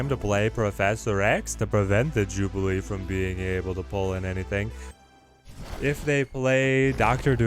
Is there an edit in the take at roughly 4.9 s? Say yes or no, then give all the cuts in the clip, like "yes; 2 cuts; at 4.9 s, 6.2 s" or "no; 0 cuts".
yes; 1 cut; at 4.9 s